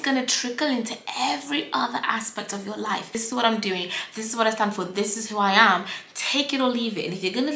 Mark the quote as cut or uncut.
cut